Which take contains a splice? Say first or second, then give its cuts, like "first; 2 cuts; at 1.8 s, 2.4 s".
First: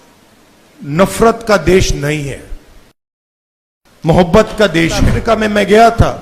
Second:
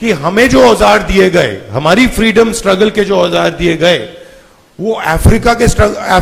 first; 1 cut; at 5.1 s